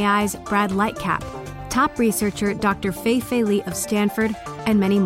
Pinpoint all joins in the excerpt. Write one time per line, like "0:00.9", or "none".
none